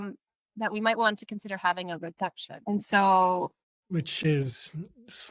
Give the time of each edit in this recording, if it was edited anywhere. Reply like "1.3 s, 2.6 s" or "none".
2.5 s, 4.2 s